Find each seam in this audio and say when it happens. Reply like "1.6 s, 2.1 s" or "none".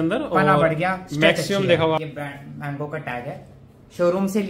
2.0 s